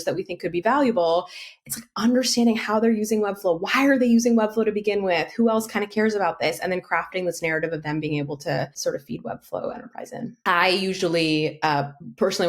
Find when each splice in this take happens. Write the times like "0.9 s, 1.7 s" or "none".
8.8 s, 10.2 s